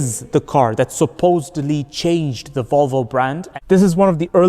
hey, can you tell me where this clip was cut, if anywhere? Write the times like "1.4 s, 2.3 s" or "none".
3.5 s